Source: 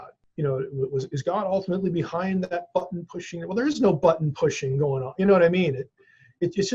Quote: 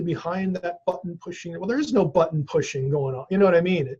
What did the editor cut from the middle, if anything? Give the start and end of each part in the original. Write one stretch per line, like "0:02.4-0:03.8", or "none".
none